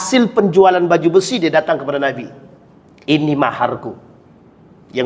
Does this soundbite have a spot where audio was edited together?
no; 0 cuts

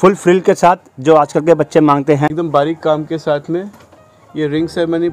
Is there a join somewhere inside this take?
yes; 1 cut; at 2.3 s

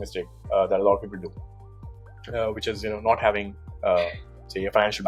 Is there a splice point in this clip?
no; 0 cuts

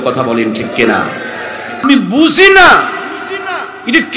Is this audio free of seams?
no; 1 cut; at 1.8 s

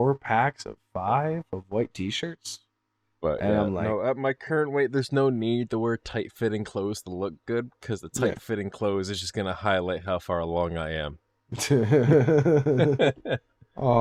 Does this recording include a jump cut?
no; 0 cuts

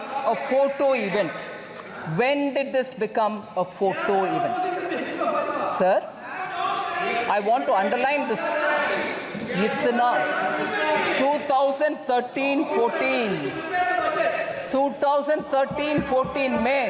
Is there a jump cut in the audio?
no; 0 cuts

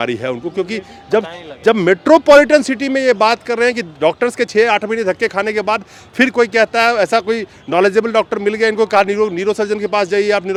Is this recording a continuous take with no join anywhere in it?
yes; 0 cuts

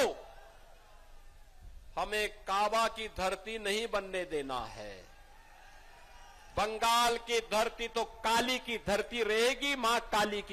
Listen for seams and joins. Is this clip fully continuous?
yes; 0 cuts

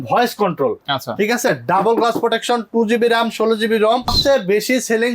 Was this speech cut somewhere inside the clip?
yes; 1 cut; at 4.2 s

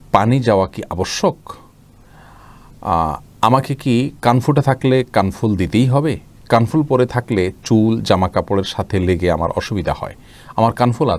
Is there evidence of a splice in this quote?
no; 0 cuts

